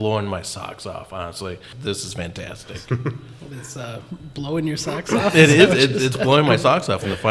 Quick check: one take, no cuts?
no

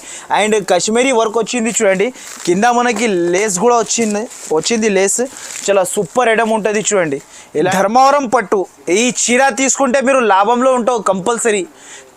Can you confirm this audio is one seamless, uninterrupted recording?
no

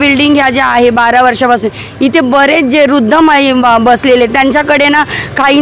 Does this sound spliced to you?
no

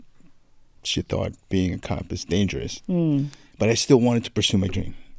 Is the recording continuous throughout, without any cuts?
no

